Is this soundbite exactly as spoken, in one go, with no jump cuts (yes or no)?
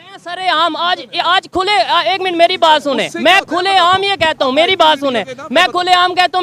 yes